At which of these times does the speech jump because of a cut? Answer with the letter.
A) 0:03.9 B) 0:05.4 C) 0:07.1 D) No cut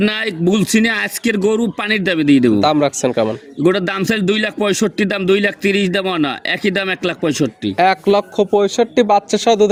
D